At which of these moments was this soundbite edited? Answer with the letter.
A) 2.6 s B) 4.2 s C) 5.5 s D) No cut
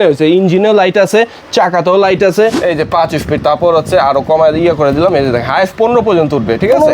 A